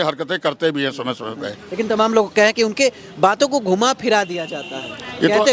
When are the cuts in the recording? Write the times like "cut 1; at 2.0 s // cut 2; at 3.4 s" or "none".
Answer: none